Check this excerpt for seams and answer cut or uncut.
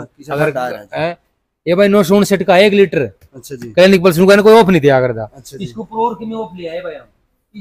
uncut